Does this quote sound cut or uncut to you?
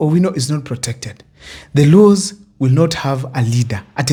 uncut